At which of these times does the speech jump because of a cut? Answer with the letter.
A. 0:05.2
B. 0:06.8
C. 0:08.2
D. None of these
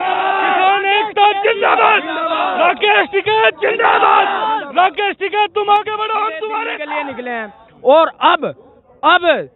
B